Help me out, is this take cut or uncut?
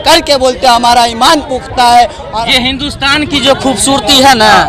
cut